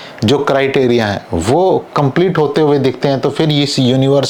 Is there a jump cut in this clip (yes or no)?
no